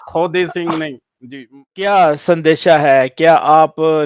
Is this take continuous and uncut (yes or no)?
no